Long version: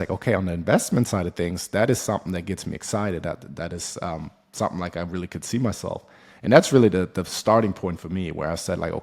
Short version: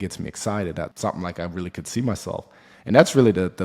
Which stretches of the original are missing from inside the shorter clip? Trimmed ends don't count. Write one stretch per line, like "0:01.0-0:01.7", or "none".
0:03.4-0:04.5